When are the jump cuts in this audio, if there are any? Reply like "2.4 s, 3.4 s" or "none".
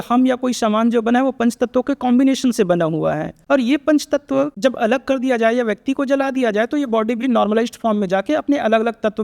3.3 s, 4.5 s